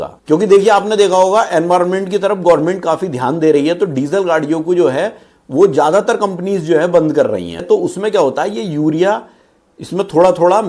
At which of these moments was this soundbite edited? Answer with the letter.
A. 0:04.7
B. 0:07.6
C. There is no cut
B